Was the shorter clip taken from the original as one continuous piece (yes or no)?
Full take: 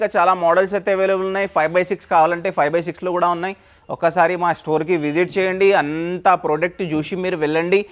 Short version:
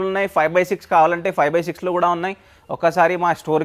yes